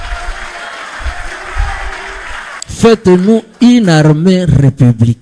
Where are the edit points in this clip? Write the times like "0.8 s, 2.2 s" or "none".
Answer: 2.5 s